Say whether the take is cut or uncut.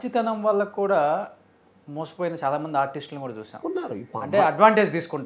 uncut